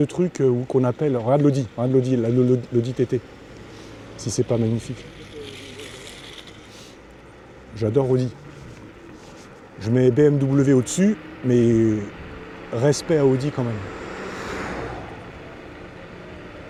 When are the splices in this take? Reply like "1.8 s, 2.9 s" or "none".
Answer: none